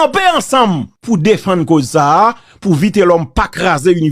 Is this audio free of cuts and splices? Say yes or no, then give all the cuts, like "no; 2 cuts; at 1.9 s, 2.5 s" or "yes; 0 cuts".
no; 1 cut; at 0.9 s